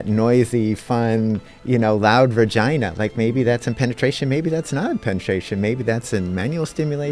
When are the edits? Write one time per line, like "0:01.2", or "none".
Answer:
none